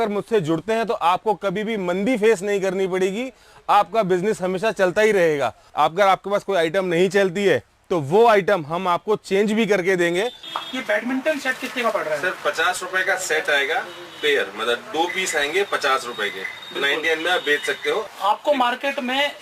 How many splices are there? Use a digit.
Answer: 3